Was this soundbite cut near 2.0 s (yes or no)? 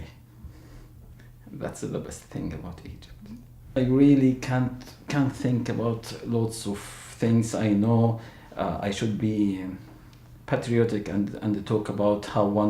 yes